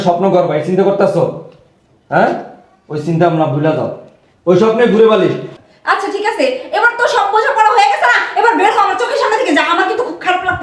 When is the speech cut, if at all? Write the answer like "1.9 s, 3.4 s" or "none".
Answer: none